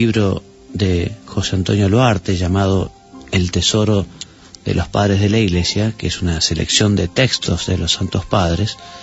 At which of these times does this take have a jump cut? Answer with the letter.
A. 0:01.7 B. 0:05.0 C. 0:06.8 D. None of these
C